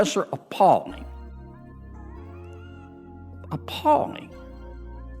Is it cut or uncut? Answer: cut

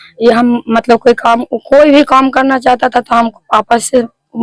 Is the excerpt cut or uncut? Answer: uncut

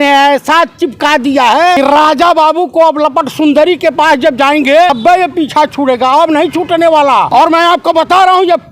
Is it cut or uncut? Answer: cut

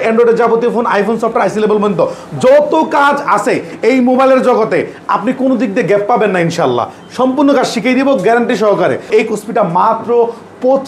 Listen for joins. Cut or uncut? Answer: cut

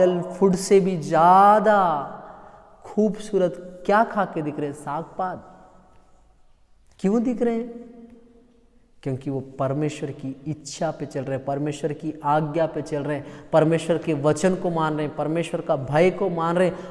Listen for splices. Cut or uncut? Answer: uncut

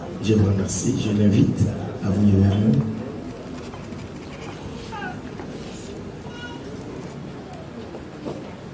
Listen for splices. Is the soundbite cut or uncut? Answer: uncut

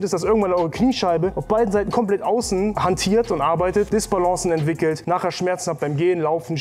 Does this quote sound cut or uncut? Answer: cut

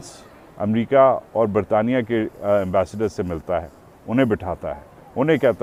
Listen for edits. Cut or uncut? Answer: uncut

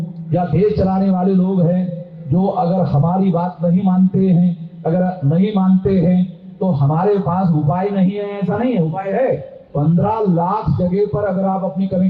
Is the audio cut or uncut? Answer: uncut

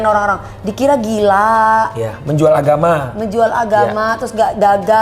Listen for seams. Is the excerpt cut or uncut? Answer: uncut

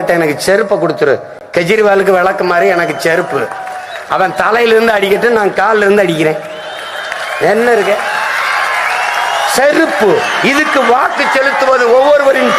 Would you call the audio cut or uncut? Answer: uncut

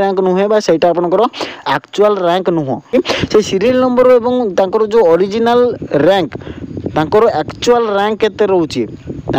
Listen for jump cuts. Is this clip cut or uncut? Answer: cut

